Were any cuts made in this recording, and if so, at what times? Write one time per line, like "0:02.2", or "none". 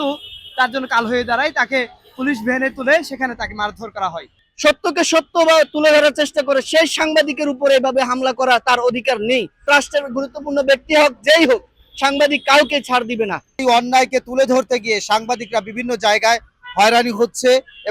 0:04.5
0:09.7
0:13.6